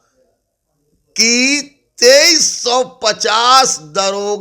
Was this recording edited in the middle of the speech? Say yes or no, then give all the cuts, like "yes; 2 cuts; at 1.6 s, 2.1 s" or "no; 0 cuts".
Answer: no; 0 cuts